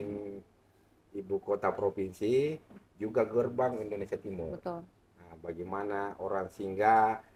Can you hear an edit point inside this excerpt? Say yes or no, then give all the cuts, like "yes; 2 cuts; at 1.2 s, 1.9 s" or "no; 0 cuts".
no; 0 cuts